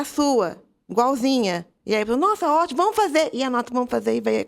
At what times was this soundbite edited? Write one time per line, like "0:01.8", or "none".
0:01.7

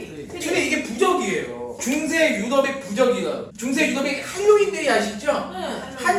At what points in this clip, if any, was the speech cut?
0:01.7
0:03.5

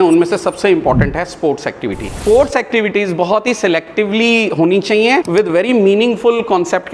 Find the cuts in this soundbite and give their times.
0:02.2
0:05.3

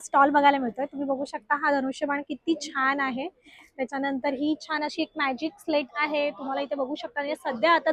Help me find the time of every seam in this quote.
none

